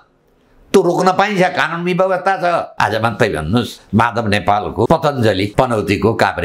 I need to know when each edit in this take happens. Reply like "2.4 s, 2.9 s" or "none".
2.7 s, 3.8 s, 4.9 s, 5.5 s